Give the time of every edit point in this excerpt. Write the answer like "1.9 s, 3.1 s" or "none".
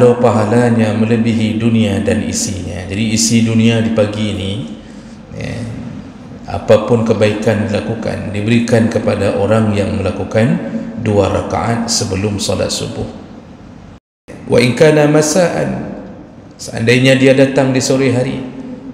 14.4 s